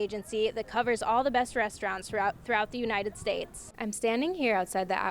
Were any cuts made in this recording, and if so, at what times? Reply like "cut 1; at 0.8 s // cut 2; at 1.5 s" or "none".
cut 1; at 3.6 s